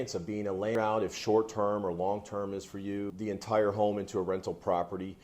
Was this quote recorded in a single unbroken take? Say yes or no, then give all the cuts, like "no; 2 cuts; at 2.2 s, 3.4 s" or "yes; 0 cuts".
no; 2 cuts; at 0.7 s, 3.3 s